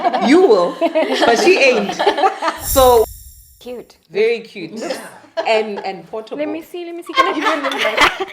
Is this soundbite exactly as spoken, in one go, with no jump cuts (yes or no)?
no